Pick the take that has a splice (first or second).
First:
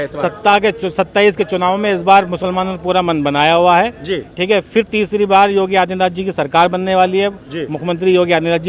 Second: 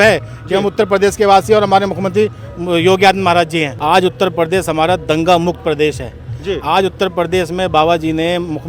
second